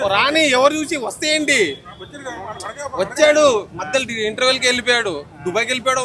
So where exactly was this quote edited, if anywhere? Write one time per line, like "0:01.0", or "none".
none